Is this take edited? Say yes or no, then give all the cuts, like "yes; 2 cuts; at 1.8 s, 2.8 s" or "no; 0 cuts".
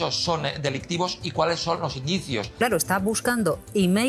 yes; 1 cut; at 2.5 s